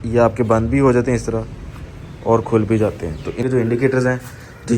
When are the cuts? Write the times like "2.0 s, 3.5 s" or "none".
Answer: 3.4 s